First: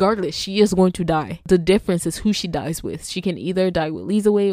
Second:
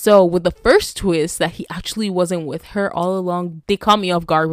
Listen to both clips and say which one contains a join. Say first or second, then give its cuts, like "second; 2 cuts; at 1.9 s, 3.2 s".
second; 1 cut; at 3.6 s